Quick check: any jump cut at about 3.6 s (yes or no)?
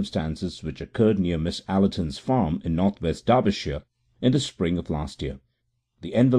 yes